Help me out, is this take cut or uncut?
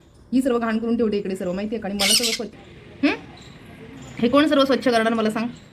cut